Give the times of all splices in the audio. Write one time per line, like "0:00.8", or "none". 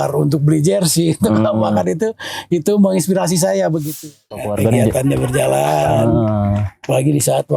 0:04.1